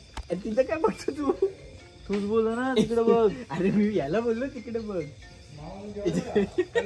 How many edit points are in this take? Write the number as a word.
zero